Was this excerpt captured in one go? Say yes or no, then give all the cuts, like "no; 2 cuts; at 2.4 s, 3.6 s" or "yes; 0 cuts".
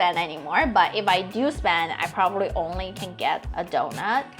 yes; 0 cuts